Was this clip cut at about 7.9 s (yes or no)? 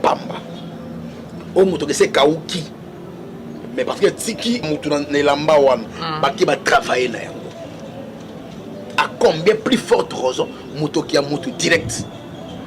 no